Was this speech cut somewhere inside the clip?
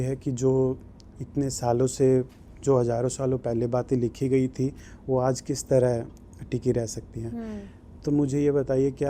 no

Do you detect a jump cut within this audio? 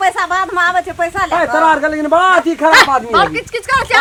no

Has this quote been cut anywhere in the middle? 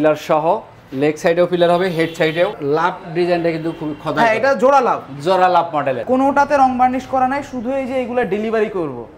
yes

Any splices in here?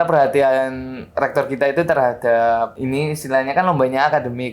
yes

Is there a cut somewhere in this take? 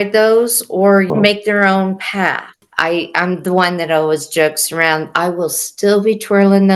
yes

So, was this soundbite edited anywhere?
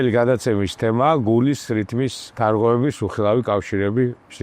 yes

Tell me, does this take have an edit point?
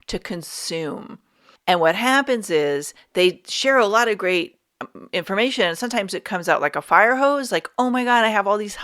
no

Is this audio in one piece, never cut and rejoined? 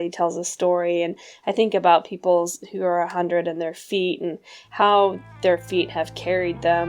yes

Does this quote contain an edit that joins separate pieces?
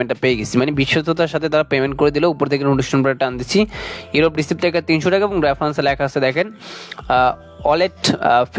no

